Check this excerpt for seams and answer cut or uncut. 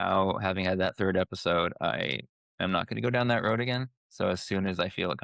cut